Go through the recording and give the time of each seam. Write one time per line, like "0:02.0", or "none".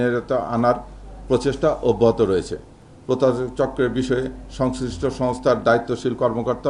0:02.9